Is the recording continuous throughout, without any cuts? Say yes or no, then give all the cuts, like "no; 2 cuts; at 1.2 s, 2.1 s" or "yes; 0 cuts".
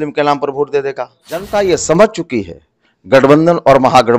no; 1 cut; at 1.5 s